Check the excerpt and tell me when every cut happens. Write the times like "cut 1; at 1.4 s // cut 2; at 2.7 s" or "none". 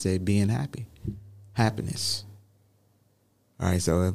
none